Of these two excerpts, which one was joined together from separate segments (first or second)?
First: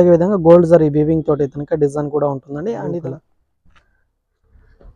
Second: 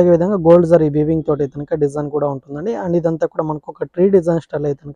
first